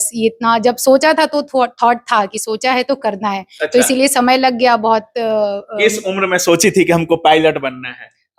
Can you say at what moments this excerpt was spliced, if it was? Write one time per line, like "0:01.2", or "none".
none